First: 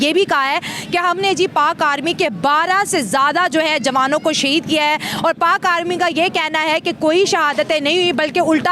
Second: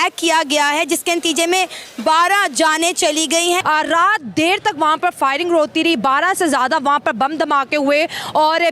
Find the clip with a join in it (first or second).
second